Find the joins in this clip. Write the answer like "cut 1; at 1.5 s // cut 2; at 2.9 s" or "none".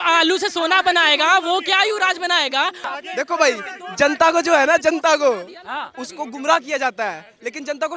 cut 1; at 2.8 s